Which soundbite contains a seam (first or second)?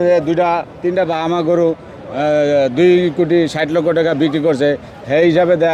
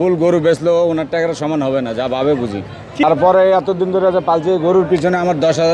second